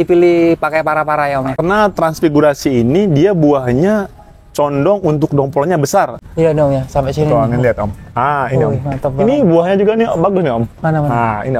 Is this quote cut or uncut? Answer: cut